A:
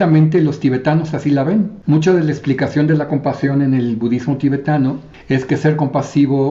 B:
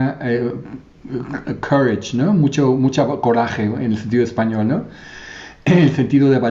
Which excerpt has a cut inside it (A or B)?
A